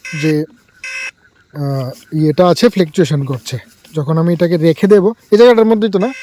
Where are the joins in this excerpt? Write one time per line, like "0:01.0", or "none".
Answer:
none